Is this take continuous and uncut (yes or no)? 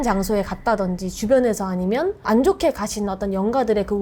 yes